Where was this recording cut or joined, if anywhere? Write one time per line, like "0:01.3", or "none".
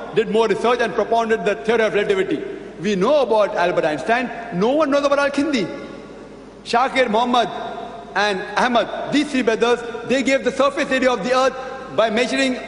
0:03.5